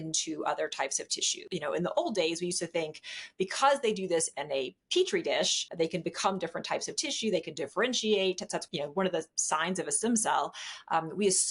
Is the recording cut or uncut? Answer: cut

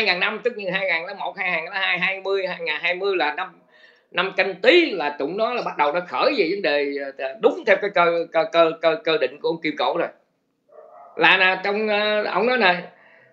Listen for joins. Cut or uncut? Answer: uncut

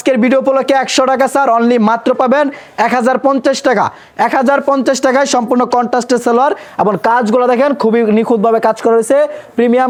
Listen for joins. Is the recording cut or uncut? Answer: uncut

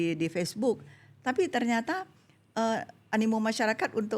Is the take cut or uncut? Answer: uncut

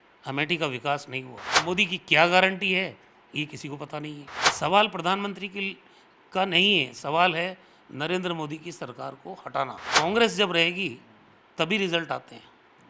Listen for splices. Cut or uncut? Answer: cut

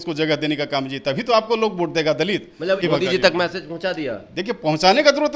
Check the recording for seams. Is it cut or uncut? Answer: cut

